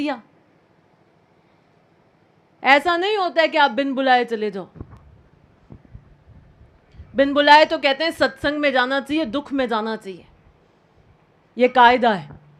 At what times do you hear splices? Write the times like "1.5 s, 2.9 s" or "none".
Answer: none